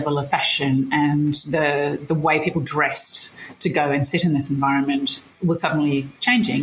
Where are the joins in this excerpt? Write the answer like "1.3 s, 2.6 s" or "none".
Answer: none